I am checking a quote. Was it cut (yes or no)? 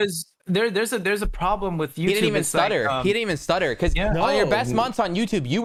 no